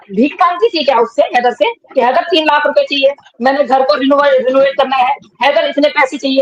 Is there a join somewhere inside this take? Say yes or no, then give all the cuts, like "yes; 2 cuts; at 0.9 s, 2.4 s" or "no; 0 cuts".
no; 0 cuts